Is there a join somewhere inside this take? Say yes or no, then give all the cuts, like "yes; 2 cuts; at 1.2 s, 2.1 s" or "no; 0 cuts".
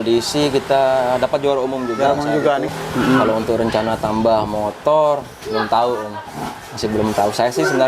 yes; 1 cut; at 2.7 s